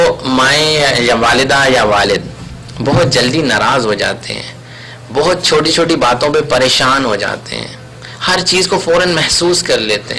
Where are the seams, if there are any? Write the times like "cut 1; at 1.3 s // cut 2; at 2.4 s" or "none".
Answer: none